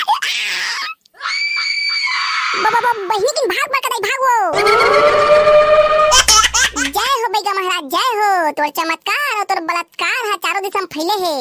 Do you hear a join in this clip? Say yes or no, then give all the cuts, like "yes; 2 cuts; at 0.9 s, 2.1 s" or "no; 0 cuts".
yes; 1 cut; at 6.1 s